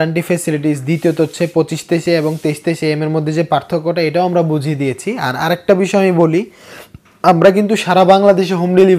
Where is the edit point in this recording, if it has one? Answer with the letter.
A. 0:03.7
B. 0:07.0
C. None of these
C